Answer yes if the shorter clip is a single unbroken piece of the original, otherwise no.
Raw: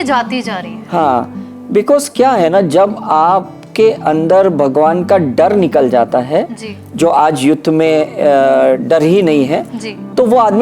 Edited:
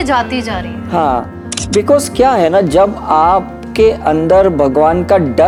yes